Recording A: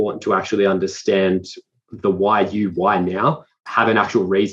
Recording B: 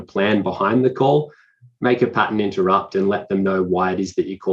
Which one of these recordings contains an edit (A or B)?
A